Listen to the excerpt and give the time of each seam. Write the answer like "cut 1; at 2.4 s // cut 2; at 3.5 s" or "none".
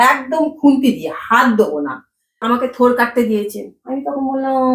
cut 1; at 2.4 s